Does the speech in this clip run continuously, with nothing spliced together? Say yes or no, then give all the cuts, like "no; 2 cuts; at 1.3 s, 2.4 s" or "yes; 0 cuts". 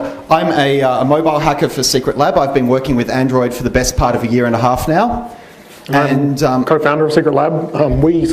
no; 1 cut; at 7.1 s